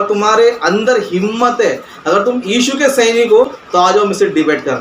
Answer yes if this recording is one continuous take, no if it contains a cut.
no